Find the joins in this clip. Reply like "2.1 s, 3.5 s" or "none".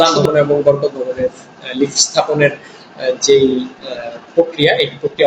none